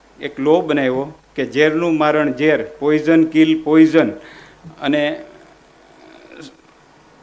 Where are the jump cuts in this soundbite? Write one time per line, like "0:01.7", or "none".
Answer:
none